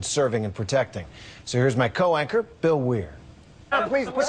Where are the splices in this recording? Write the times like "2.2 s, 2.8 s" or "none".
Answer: 1.4 s